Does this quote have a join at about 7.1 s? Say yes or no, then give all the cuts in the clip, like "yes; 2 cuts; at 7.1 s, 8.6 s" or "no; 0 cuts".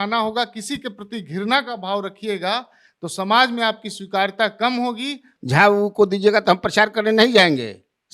no; 1 cut; at 5.3 s